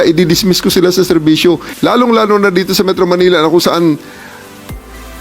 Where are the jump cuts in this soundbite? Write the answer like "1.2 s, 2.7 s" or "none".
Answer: 1.7 s